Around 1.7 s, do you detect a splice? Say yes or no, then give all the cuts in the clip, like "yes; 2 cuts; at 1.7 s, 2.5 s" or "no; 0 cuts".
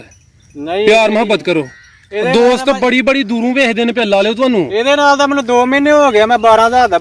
no; 0 cuts